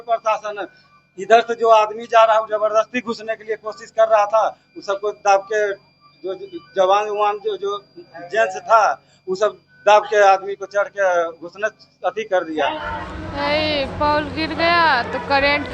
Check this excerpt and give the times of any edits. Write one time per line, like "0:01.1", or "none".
0:12.9